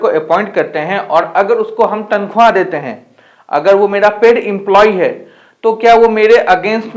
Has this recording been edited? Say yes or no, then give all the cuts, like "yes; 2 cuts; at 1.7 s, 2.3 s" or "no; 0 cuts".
no; 0 cuts